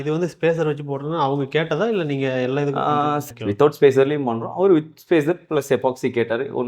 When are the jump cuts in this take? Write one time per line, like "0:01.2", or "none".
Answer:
0:03.2